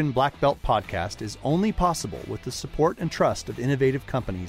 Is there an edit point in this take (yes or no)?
no